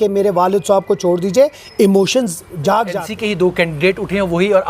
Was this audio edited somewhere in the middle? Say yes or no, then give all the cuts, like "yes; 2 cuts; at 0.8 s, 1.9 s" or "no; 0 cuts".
yes; 1 cut; at 3.1 s